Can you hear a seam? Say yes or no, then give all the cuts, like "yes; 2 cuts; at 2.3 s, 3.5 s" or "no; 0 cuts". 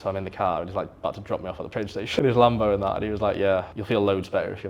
yes; 2 cuts; at 2.1 s, 3.7 s